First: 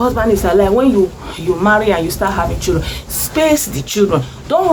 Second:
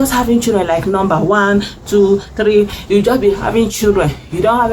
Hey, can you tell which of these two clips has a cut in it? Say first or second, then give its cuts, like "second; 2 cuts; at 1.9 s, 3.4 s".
second; 1 cut; at 2.8 s